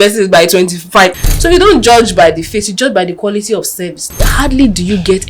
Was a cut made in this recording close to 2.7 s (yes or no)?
no